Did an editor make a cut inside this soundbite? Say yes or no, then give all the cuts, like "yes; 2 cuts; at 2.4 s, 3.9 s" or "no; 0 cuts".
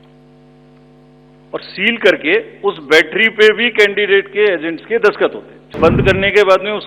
yes; 1 cut; at 5.8 s